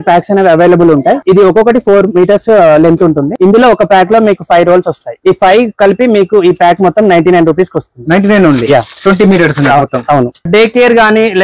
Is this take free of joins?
no; 4 cuts; at 1.2 s, 3.3 s, 5.1 s, 10.5 s

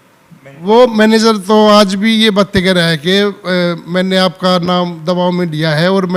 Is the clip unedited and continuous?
yes; 0 cuts

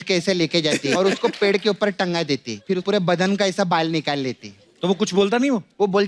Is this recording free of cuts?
no; 2 cuts; at 1.0 s, 2.8 s

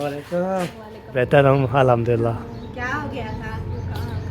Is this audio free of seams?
no; 1 cut; at 1.2 s

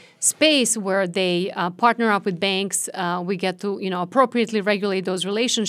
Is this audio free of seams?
yes; 0 cuts

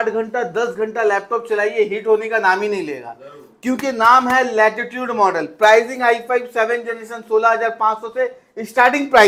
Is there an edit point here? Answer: no; 0 cuts

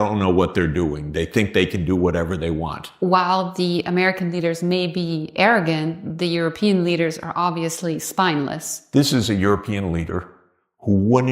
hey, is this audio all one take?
no; 2 cuts; at 2.8 s, 8.8 s

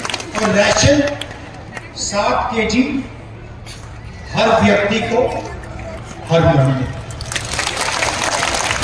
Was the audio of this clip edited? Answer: no; 0 cuts

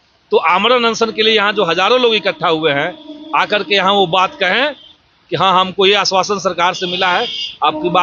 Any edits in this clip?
no; 0 cuts

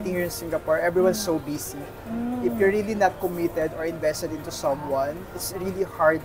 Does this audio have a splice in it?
no; 0 cuts

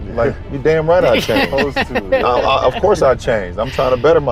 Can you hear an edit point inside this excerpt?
no; 0 cuts

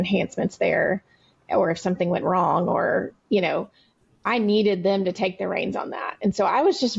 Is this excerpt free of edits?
yes; 0 cuts

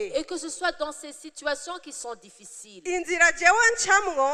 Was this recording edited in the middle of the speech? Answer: no; 0 cuts

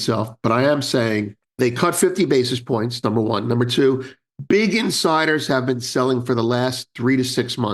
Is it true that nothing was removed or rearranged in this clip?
no; 1 cut; at 1.4 s

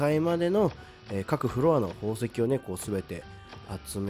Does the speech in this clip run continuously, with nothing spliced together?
yes; 0 cuts

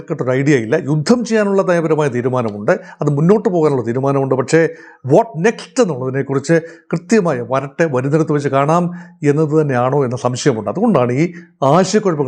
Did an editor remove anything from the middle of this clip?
no; 0 cuts

